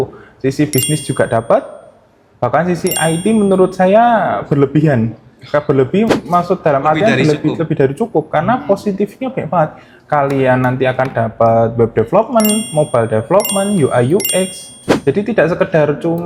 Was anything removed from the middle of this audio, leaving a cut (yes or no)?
no